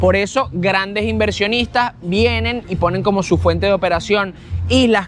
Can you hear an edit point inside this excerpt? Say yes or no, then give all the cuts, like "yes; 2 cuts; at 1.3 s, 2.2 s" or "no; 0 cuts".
no; 0 cuts